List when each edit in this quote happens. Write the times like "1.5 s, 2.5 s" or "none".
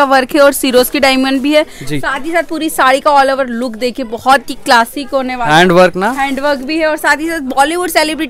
none